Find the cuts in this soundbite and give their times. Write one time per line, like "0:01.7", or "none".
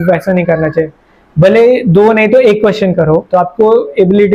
none